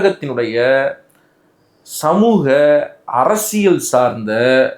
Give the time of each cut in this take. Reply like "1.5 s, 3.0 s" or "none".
none